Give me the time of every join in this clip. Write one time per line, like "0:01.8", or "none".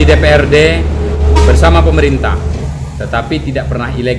0:01.2
0:02.7